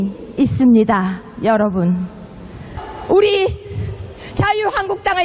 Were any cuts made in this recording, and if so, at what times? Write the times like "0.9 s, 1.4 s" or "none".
2.6 s